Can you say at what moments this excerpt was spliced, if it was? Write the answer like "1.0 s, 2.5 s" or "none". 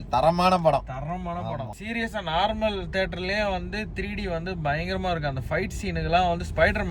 1.7 s